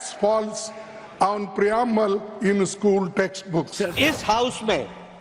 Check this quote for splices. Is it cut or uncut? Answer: cut